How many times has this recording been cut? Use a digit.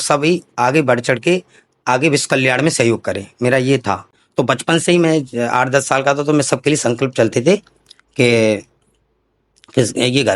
1